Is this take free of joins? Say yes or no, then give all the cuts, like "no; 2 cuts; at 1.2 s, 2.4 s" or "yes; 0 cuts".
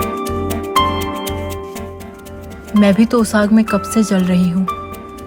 yes; 0 cuts